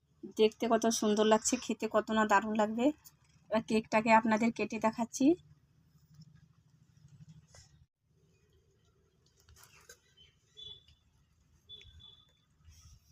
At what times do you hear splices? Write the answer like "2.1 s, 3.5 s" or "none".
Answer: none